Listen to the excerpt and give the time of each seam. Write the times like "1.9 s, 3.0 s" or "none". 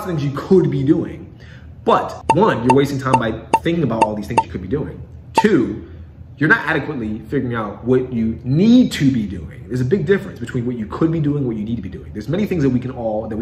2.2 s